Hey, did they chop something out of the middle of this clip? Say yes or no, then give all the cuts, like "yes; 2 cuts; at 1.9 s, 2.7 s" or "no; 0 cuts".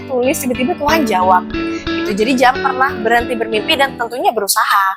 no; 0 cuts